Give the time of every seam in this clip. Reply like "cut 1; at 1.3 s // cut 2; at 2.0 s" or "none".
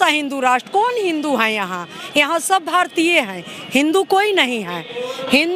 none